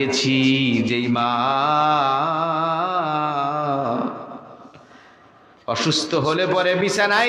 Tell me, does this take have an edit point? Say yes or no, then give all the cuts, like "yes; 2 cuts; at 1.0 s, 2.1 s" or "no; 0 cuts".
no; 0 cuts